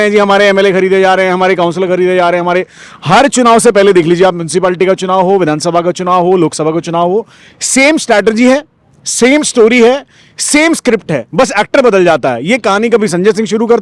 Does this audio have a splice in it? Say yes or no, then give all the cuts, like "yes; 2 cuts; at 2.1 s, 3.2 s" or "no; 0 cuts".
no; 0 cuts